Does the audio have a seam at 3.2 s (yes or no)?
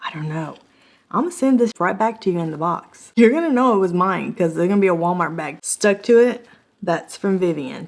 no